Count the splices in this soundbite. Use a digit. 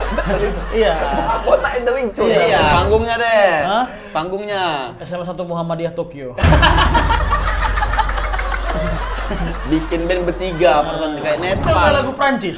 2